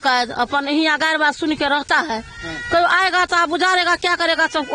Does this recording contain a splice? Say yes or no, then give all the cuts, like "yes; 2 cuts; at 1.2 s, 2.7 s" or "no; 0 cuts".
no; 0 cuts